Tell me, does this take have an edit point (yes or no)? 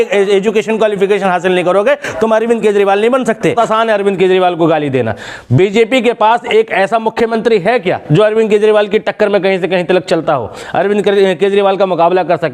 yes